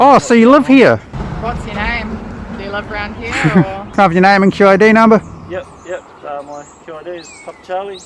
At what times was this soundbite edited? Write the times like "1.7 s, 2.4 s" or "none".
1.1 s, 3.8 s